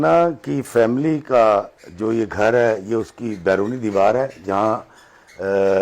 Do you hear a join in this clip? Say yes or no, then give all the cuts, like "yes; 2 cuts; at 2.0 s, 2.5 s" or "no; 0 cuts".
no; 0 cuts